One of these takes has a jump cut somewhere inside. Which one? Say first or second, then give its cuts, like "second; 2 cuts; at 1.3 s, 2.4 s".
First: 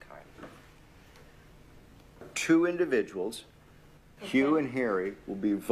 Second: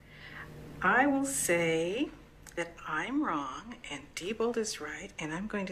first; 1 cut; at 2.4 s